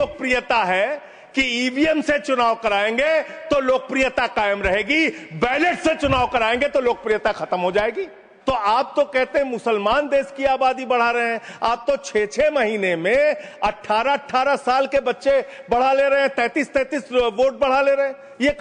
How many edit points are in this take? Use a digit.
1